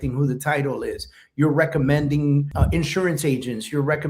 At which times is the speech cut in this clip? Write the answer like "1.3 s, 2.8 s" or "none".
2.5 s